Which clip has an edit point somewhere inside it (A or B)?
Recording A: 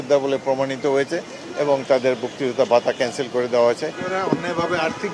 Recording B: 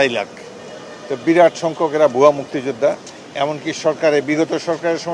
A